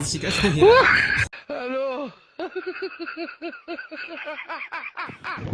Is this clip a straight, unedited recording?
yes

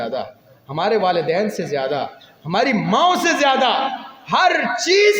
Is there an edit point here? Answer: no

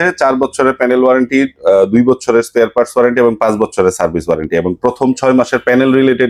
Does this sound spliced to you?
no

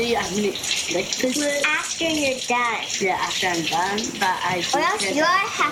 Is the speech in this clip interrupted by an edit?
no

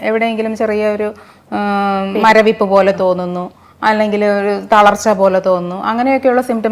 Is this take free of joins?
yes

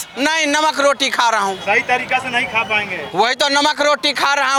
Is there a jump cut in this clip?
no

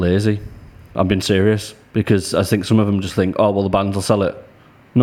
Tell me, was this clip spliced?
no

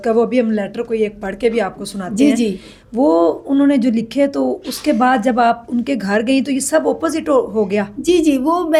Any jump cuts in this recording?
no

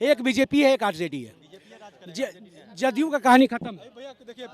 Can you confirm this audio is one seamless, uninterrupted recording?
yes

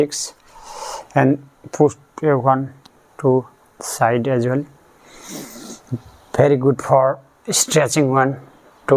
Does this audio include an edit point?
no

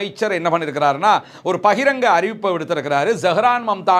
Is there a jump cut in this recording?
no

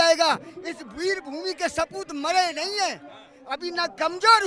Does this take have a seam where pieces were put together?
no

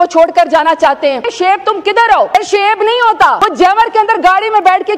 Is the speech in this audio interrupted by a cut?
yes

